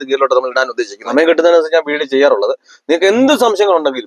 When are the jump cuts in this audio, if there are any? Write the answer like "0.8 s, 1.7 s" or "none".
0.9 s